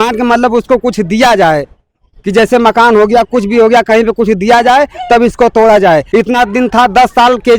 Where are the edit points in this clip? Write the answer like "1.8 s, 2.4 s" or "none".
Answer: 6.1 s